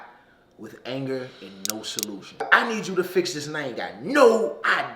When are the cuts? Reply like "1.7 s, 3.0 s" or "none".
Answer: 2.5 s